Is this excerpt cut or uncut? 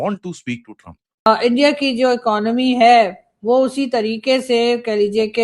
cut